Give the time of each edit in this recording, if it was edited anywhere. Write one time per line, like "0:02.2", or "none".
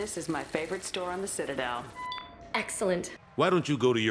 0:03.2

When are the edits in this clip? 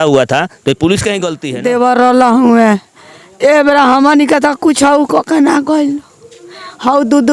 0:01.3

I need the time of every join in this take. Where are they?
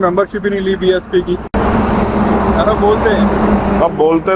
none

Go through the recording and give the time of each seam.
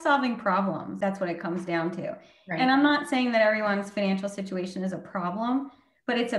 0:00.9

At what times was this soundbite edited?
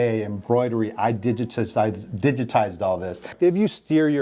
0:03.3

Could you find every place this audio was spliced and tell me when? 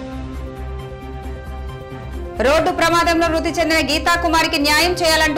0:01.4

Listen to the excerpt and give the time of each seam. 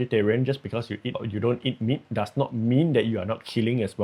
0:01.2

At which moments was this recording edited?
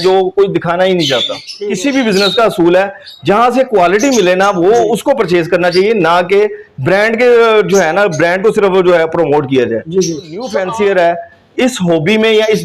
0:01.5
0:10.5

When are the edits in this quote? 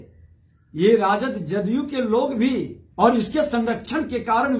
0:02.8

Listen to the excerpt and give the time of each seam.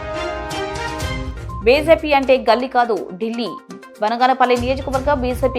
0:01.3

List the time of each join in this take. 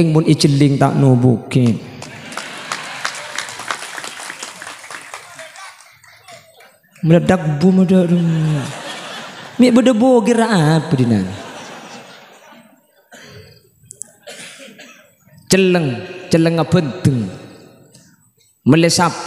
none

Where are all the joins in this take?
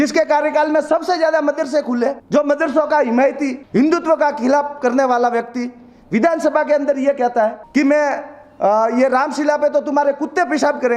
0:02.2
0:03.6
0:07.6

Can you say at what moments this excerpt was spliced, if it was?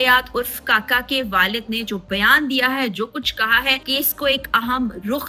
0:03.8

